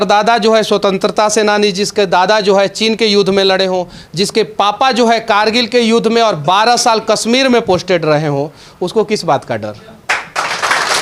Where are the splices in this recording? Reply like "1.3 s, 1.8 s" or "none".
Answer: none

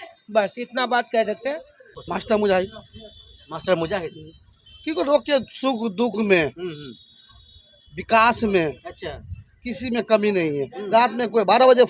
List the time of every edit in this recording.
1.9 s

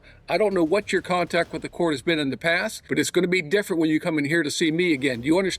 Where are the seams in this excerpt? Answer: 2.8 s

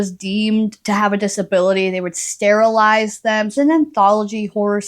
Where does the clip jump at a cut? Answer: 3.5 s

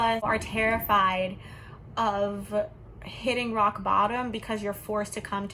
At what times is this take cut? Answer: none

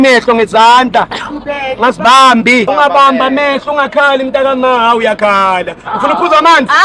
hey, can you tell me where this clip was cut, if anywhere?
2.7 s

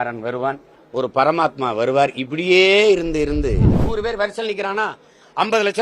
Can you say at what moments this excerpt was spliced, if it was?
3.8 s

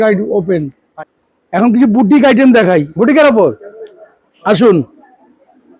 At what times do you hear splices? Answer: 0.9 s

